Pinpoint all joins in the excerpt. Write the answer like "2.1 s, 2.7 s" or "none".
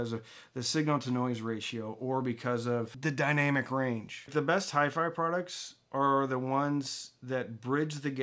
2.9 s, 4.3 s